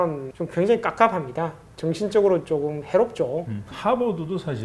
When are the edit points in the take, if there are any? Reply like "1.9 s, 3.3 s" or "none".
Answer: 3.7 s